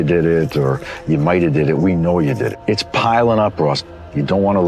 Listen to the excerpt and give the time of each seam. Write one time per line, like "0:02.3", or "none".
0:02.5